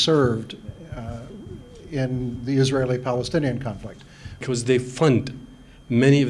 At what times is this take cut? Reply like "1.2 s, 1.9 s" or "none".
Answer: 4.4 s